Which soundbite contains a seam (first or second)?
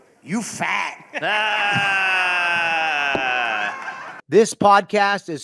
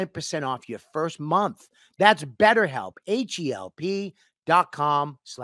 first